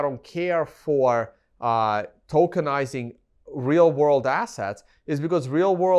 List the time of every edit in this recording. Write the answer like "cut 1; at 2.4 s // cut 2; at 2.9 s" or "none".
none